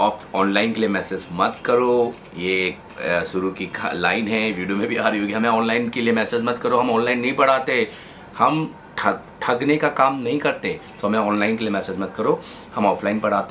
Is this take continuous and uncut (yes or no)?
yes